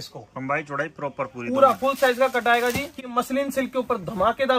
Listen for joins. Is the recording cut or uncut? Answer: cut